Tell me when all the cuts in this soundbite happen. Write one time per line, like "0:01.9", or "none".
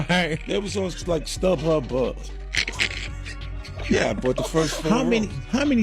none